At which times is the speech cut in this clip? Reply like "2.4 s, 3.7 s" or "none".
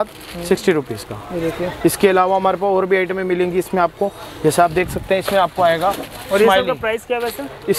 none